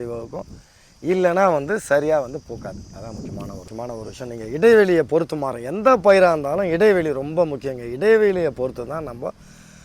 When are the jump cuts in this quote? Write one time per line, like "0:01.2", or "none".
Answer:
0:03.7